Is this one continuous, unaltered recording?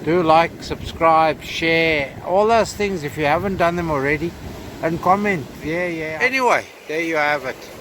no; 1 cut; at 6.0 s

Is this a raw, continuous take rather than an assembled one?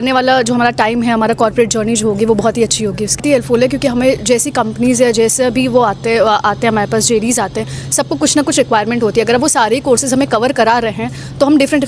no; 1 cut; at 3.2 s

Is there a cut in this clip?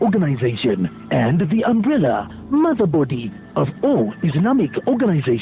no; 0 cuts

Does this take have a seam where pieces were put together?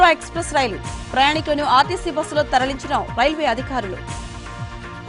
no; 0 cuts

